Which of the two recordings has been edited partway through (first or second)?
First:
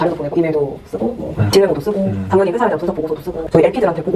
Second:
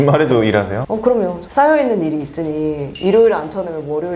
second